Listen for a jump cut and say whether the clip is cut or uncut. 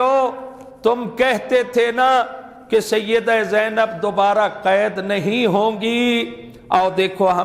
uncut